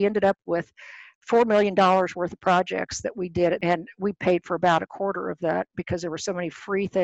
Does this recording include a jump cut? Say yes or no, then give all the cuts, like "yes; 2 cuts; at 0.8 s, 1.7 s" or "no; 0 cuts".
yes; 2 cuts; at 1.1 s, 3.6 s